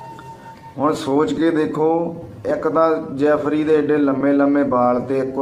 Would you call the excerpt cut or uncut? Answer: uncut